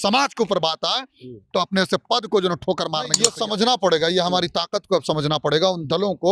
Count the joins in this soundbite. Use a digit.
1